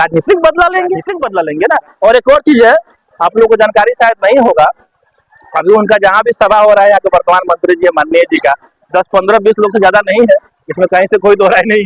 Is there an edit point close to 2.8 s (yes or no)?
no